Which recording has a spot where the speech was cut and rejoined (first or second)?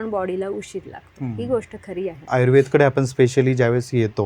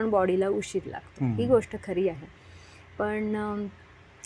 first